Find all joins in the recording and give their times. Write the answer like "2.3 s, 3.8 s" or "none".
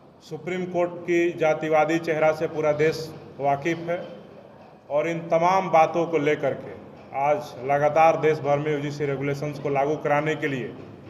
none